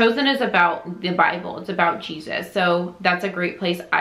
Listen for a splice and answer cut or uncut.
uncut